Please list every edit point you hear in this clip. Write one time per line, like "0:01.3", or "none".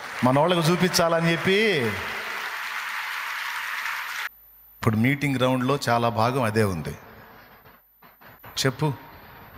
0:04.3
0:08.4